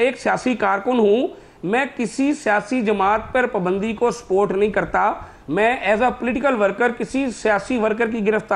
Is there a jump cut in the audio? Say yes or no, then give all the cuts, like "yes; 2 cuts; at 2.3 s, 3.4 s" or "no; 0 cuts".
no; 0 cuts